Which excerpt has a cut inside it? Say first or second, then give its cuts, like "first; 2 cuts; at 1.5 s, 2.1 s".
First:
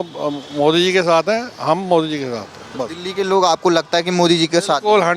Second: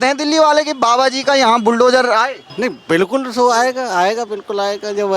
second; 1 cut; at 2.4 s